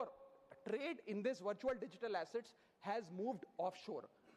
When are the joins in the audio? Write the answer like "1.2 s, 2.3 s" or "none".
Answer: none